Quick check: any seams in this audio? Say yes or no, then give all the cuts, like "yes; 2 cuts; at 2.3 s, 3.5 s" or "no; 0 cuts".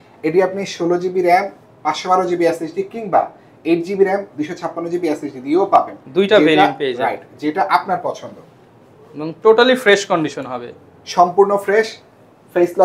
no; 0 cuts